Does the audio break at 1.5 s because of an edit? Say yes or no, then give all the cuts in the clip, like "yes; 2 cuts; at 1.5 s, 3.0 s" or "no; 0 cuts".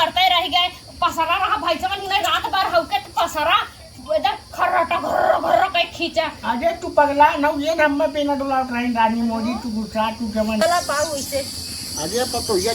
no; 1 cut; at 10.6 s